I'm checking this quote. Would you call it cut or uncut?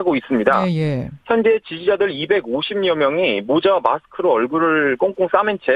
cut